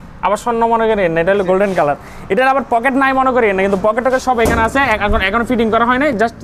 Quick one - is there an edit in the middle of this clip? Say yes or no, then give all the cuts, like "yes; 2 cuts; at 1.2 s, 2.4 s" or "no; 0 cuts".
no; 0 cuts